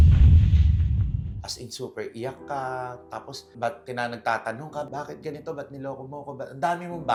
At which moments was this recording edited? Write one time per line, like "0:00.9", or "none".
none